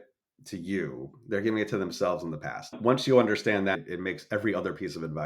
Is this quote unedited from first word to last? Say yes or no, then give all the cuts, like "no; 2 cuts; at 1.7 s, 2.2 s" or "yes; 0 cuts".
no; 1 cut; at 2.6 s